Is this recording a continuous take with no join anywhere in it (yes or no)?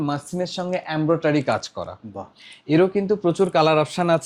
yes